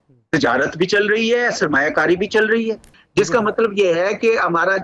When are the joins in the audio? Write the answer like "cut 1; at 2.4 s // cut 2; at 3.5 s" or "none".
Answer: cut 1; at 2.9 s

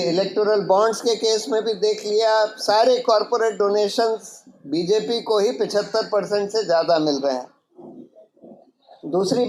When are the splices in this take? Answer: none

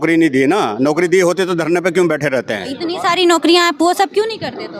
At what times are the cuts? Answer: none

